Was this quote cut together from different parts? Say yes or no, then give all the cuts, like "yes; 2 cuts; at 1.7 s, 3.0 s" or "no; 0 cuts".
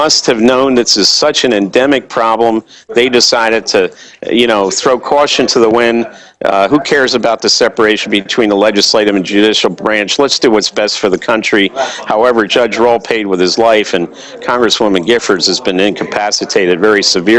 no; 0 cuts